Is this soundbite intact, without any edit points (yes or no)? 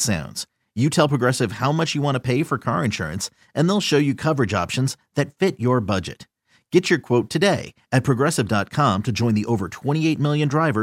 yes